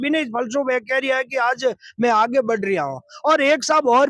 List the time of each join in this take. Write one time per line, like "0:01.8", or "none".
none